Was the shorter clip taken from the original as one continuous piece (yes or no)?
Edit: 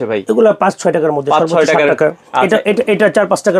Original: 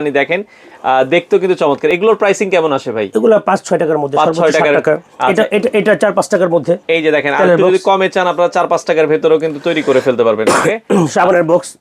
yes